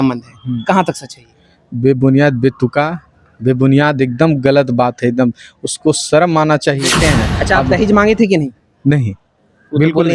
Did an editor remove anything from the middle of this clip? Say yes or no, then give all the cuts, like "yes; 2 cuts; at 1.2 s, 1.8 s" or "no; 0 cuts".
yes; 1 cut; at 6.9 s